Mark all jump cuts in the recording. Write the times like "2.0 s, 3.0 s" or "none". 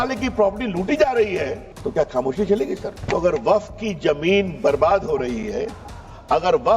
1.7 s, 2.9 s